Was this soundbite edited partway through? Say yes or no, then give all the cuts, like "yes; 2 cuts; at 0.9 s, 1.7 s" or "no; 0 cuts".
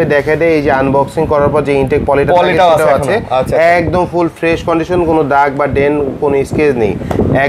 no; 0 cuts